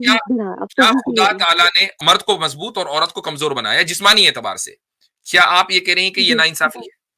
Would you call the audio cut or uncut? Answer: cut